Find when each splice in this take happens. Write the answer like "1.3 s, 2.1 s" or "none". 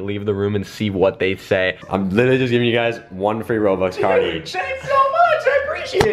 1.8 s